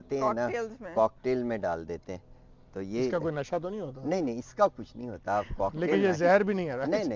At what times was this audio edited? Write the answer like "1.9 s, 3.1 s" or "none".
none